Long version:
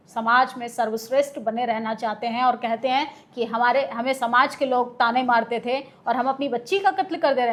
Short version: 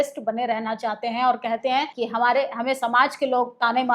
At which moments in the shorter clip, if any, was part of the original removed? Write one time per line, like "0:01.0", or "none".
0:01.9